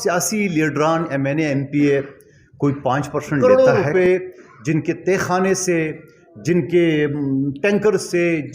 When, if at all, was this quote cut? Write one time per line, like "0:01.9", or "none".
0:03.4